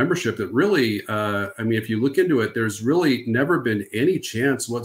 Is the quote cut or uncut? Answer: uncut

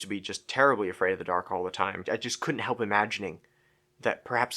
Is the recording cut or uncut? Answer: cut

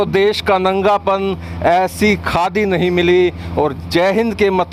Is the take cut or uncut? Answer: uncut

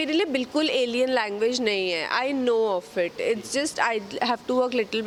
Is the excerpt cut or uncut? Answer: uncut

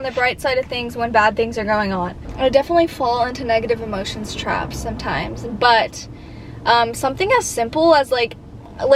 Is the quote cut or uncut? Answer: uncut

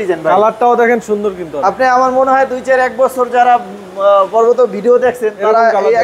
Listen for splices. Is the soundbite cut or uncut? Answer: uncut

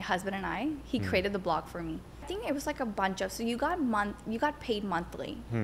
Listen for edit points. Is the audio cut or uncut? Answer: cut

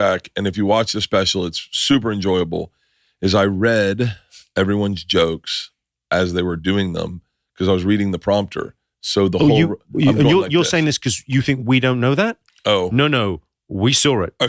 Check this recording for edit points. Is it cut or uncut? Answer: uncut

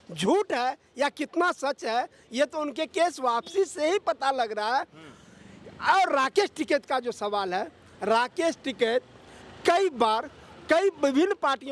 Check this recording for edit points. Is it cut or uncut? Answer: uncut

